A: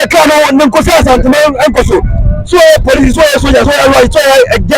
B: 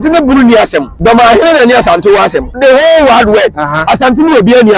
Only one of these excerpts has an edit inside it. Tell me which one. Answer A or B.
B